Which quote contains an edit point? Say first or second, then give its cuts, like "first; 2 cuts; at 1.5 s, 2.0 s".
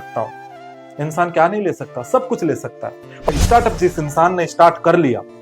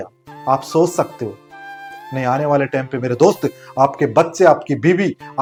first; 1 cut; at 3.2 s